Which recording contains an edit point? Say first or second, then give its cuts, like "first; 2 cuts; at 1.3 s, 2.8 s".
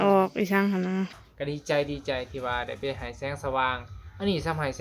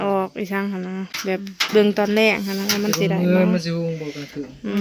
first; 1 cut; at 1.1 s